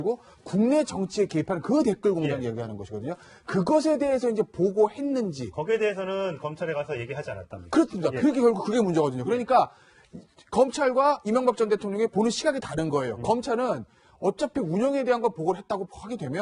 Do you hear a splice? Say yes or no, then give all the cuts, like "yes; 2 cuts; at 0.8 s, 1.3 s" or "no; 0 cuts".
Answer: no; 0 cuts